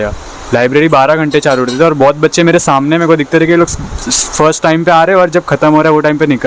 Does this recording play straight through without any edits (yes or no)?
yes